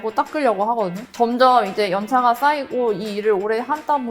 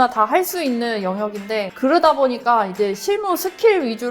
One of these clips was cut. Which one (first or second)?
first